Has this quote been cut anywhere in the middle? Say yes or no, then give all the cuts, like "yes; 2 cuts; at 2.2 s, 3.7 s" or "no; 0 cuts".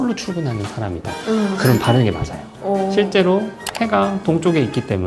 yes; 1 cut; at 1.1 s